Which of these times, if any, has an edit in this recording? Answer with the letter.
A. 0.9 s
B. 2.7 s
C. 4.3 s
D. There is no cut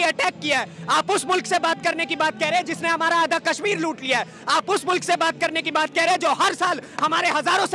D